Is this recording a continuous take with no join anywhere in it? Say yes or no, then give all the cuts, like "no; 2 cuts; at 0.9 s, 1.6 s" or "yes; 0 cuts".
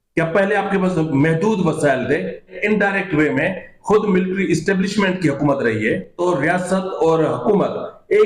no; 2 cuts; at 2.5 s, 6.1 s